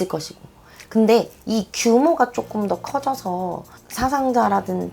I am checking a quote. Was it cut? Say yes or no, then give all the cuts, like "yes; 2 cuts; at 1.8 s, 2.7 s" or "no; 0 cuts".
yes; 1 cut; at 3.8 s